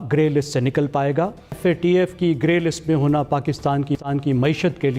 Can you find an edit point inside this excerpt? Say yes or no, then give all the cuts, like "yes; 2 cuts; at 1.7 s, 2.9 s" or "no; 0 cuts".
yes; 1 cut; at 1.6 s